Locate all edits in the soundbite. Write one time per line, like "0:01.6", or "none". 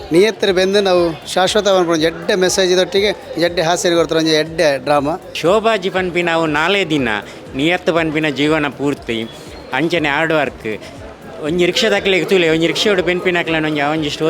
0:05.3